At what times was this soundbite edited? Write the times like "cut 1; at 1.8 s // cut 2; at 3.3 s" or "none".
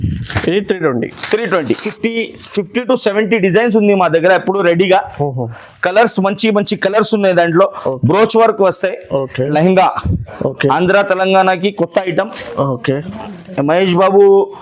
cut 1; at 1.9 s // cut 2; at 9.5 s